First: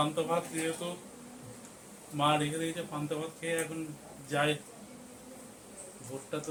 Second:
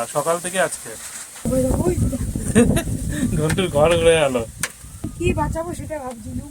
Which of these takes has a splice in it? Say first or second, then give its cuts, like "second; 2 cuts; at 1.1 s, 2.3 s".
second; 2 cuts; at 1.4 s, 5.1 s